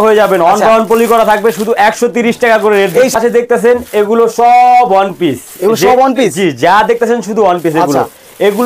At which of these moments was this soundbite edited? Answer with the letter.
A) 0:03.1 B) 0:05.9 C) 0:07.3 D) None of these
A